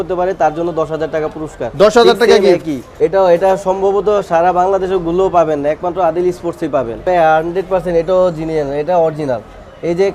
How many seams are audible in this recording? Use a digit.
2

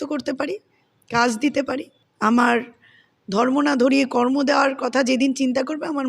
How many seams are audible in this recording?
1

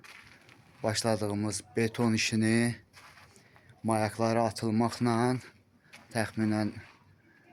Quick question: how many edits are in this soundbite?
0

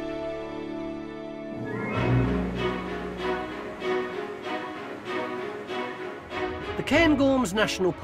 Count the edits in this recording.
1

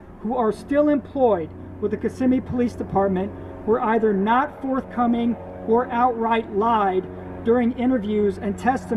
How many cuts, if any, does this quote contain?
0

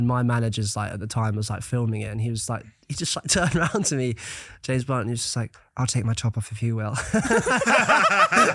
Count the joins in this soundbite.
0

